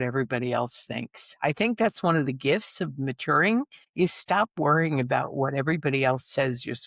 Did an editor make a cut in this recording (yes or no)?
yes